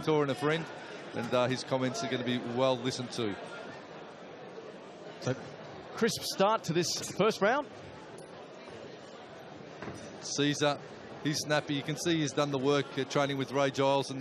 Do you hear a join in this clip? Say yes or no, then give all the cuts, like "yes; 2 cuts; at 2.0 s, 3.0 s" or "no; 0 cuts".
yes; 1 cut; at 7.0 s